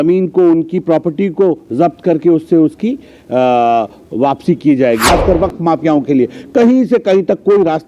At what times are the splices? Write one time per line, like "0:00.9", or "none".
0:05.0